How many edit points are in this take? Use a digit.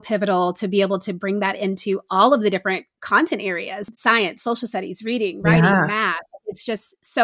1